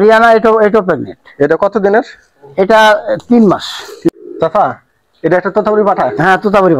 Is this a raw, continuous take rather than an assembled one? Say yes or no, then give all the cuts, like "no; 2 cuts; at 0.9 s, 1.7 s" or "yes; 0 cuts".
no; 1 cut; at 4.1 s